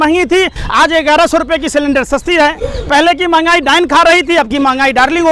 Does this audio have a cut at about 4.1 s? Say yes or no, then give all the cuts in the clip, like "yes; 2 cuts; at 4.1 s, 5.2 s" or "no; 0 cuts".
no; 0 cuts